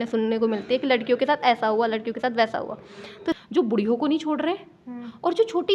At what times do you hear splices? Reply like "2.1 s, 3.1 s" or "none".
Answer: 3.4 s